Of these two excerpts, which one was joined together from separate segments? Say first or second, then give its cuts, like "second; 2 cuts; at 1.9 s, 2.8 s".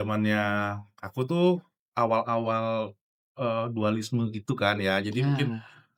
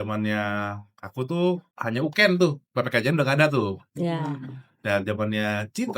second; 1 cut; at 1.7 s